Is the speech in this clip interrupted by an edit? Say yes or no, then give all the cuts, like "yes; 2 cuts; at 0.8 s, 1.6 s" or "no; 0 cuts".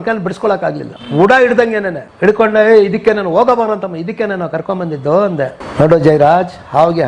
no; 0 cuts